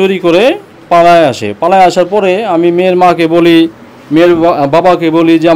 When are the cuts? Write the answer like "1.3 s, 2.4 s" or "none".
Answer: none